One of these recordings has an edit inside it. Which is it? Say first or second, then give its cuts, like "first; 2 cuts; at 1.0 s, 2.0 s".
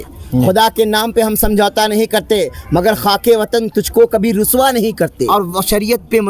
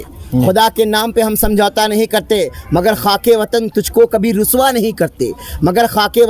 first; 1 cut; at 5.2 s